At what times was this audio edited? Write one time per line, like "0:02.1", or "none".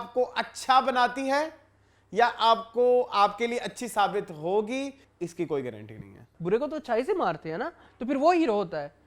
0:05.0
0:06.3